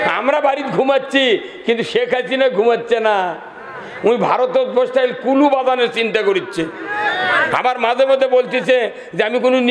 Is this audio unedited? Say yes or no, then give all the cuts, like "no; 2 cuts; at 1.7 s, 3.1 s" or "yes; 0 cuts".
yes; 0 cuts